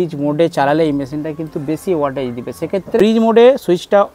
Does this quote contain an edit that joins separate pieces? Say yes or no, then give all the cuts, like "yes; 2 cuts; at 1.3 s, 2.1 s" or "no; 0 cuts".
yes; 1 cut; at 3.0 s